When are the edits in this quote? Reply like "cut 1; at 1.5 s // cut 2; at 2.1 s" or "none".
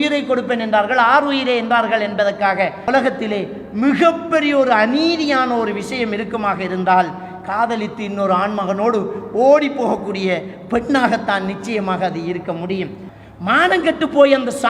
cut 1; at 2.8 s // cut 2; at 13.1 s